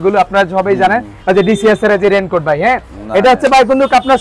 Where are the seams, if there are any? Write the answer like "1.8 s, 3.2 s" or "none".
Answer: 1.1 s